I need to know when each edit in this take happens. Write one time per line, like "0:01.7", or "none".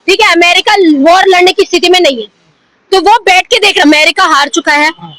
0:03.8